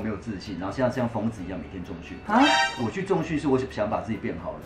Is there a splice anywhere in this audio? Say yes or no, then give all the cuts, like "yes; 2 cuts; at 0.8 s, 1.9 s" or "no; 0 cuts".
no; 0 cuts